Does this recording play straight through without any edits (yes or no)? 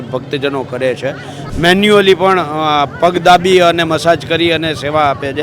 no